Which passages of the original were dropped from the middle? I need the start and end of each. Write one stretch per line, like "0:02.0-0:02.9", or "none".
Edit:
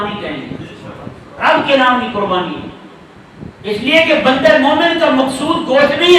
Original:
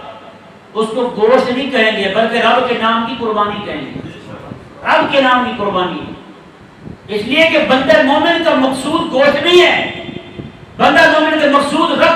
none

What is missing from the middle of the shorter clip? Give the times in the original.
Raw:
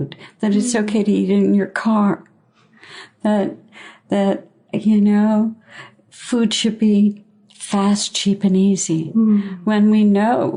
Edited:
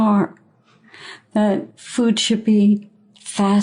0:03.7-0:06.1

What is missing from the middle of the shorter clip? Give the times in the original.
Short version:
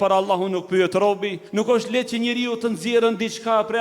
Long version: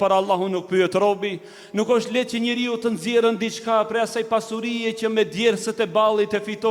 0:01.4-0:01.6

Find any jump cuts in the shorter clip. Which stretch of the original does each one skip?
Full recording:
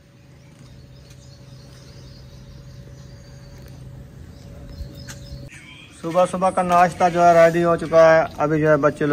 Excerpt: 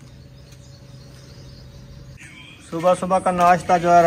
0:02.8-0:05.5

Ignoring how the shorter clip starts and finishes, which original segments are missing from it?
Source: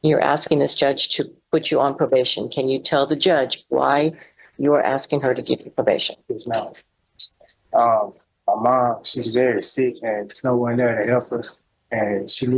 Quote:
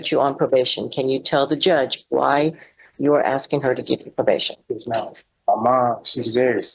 0:06.8-0:08.2

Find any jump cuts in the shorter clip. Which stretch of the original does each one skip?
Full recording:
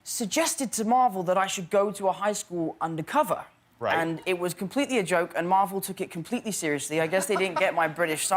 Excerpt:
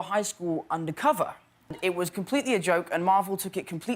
0:03.8-0:04.1

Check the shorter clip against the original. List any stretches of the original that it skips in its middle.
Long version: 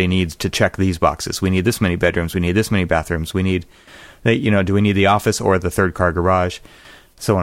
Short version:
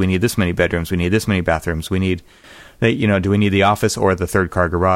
none

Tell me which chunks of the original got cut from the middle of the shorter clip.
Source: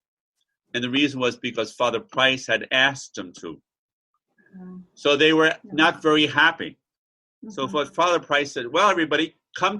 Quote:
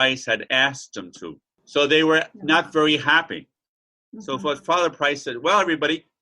0:03.7-0:04.8

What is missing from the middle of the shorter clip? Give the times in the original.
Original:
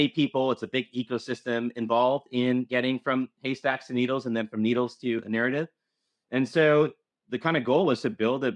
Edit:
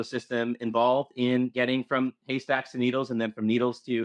none

